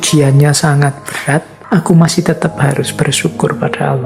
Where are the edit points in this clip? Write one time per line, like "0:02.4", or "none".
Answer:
0:01.5